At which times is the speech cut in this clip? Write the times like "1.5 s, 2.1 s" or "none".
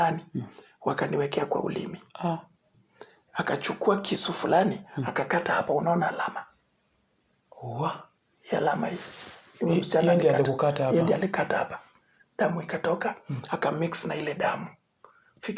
2.7 s